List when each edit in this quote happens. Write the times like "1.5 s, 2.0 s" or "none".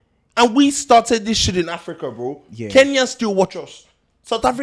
none